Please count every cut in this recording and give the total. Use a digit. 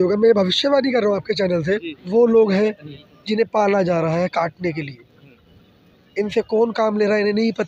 1